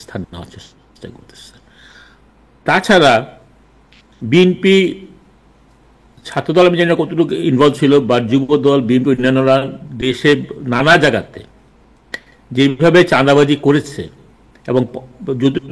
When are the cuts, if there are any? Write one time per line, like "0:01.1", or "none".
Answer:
none